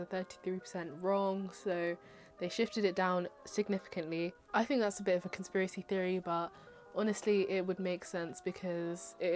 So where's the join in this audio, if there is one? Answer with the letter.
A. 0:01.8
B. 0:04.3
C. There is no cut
B